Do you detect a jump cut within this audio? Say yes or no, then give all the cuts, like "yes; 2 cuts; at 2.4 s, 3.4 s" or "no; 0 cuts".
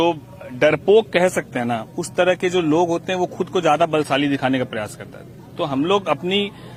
no; 0 cuts